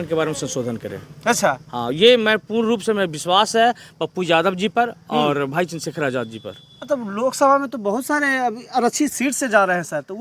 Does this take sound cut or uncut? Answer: uncut